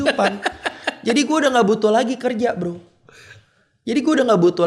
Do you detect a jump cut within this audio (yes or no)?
no